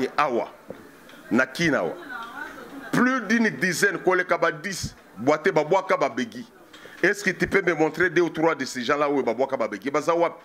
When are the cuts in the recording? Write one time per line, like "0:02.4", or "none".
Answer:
none